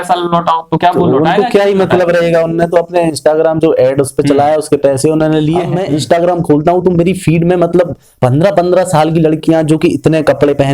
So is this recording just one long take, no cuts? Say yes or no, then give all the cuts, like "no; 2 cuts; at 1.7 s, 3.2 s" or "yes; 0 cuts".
no; 1 cut; at 5.8 s